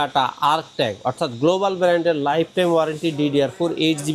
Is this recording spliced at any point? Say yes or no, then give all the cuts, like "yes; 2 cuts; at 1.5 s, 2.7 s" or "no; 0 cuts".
no; 0 cuts